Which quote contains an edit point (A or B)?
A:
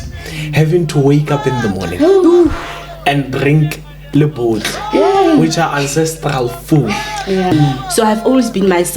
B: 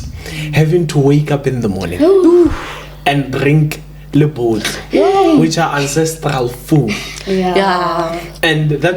A